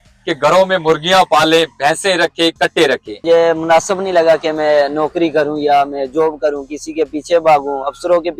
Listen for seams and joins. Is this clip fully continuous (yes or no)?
no